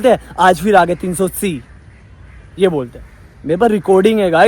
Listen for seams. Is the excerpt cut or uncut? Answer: uncut